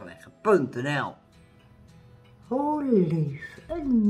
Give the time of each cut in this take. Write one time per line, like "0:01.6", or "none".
0:01.3